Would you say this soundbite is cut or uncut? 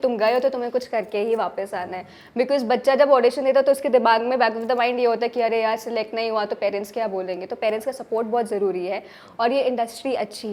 uncut